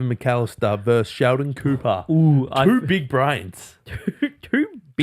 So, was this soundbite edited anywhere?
no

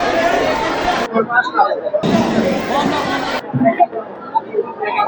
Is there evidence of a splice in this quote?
no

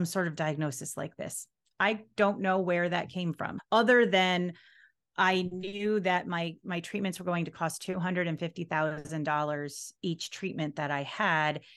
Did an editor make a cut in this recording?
yes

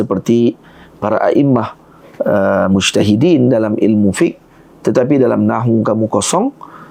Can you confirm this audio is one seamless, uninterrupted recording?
yes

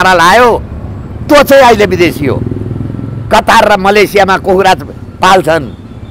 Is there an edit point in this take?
no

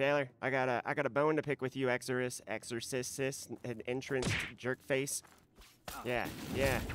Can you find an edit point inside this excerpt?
no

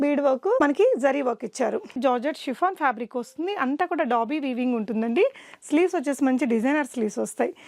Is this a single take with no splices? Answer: no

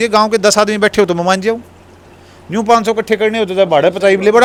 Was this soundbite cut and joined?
no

